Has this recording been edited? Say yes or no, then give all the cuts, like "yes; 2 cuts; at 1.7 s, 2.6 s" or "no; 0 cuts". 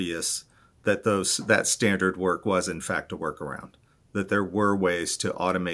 no; 0 cuts